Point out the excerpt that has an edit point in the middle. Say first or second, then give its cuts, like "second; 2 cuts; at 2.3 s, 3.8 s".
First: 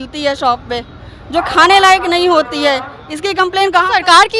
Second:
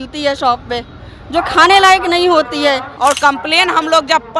second; 1 cut; at 2.9 s